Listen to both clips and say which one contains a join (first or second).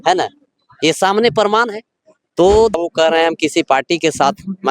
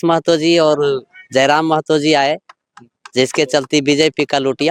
first